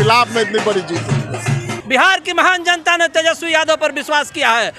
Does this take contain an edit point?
yes; 1 cut; at 1.7 s

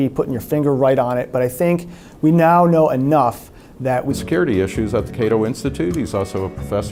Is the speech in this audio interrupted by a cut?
no; 0 cuts

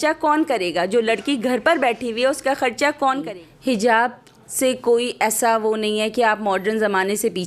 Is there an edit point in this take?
yes; 1 cut; at 3.4 s

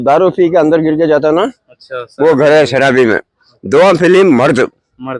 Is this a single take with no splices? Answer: yes; 0 cuts

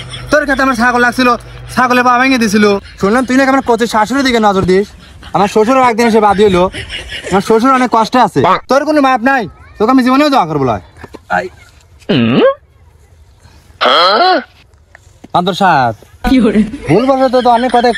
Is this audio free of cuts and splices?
yes; 0 cuts

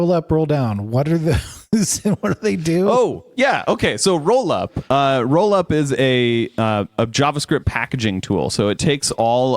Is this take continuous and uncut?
yes; 0 cuts

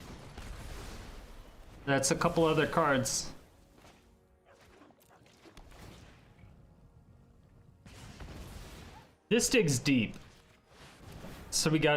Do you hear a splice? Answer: yes; 1 cut; at 9.0 s

